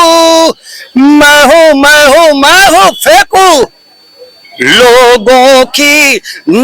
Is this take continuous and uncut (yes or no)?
yes